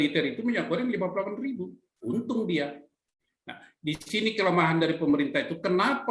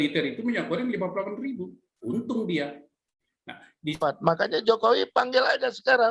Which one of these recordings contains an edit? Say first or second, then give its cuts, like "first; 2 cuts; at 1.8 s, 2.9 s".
second; 1 cut; at 3.9 s